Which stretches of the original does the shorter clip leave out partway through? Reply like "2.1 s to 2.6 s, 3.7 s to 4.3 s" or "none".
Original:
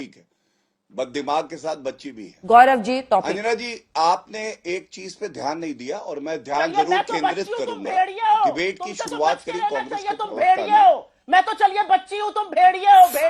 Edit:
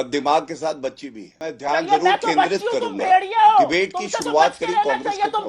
2.4 s to 6.2 s